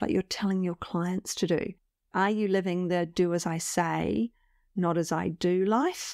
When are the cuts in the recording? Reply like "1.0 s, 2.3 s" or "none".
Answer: none